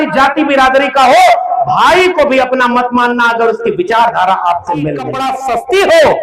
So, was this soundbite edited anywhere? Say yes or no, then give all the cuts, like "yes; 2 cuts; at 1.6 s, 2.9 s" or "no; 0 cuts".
yes; 1 cut; at 5.3 s